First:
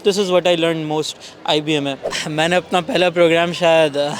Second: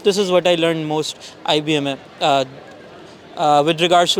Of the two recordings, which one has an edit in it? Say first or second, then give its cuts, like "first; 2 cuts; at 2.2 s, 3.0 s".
first; 1 cut; at 2.1 s